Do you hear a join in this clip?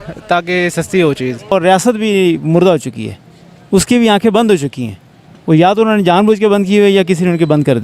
yes; 1 cut; at 1.5 s

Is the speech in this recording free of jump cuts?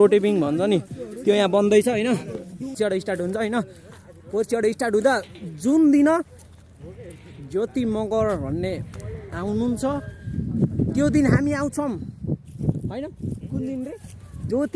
no; 1 cut; at 2.7 s

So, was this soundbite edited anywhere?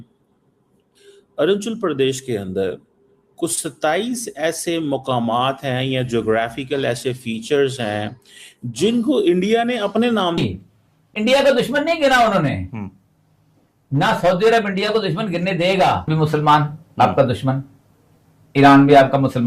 yes; 2 cuts; at 10.4 s, 16.0 s

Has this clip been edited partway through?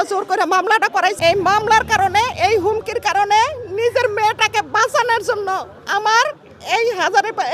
yes; 1 cut; at 1.2 s

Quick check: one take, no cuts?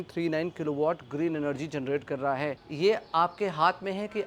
no; 1 cut; at 2.6 s

